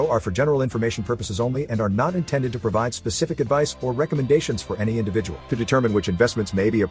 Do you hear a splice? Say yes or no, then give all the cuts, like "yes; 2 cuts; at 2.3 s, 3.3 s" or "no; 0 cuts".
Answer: no; 0 cuts